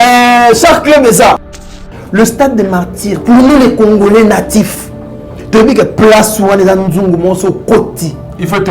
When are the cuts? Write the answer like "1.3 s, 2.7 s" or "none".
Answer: 1.7 s